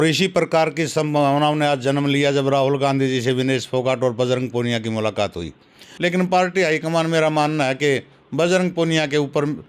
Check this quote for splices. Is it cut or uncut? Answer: cut